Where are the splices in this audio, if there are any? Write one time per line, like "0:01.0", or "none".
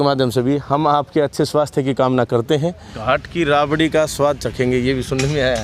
0:02.9